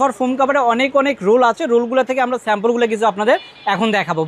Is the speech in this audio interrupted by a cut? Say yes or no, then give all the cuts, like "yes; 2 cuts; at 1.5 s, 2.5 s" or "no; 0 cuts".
no; 0 cuts